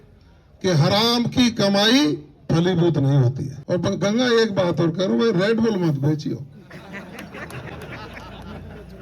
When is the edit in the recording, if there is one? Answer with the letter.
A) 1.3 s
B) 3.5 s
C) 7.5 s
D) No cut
B